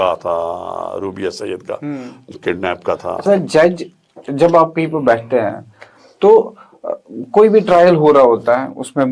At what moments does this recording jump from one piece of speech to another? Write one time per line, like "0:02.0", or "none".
0:03.2